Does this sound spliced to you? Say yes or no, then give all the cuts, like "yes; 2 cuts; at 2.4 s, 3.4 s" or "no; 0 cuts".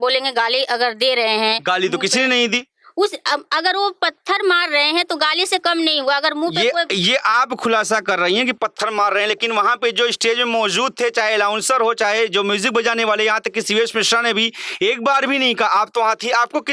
no; 0 cuts